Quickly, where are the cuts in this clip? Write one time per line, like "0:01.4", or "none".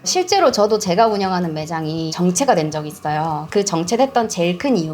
0:02.1